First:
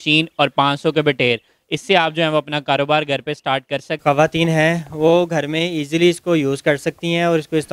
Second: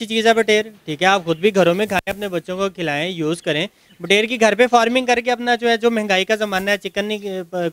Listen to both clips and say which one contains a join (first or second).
first